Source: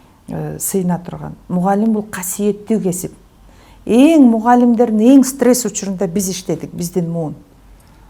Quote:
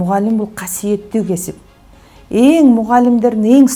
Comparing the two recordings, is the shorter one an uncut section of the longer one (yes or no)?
yes